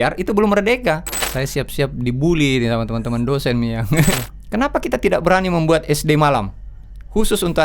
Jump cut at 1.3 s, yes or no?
yes